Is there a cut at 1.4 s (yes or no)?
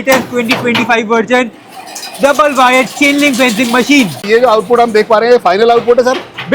no